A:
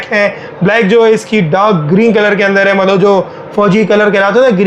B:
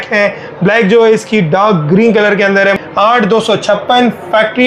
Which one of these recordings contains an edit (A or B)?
B